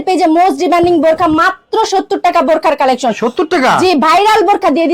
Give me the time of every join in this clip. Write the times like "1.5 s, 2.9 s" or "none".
none